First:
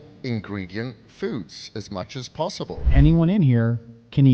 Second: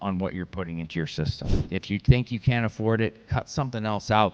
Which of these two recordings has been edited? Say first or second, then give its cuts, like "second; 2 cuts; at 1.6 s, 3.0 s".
first; 1 cut; at 2.8 s